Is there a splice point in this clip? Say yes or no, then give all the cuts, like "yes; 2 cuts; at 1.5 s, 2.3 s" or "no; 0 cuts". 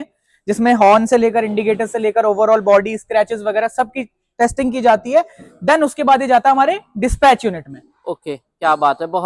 no; 0 cuts